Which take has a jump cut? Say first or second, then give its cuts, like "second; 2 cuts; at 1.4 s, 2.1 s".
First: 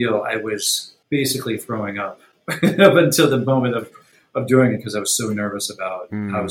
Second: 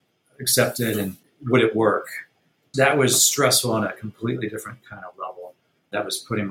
second; 2 cuts; at 1.3 s, 2.6 s